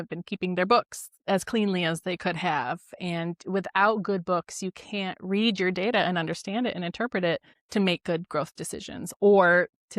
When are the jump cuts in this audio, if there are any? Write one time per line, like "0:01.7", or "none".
0:07.5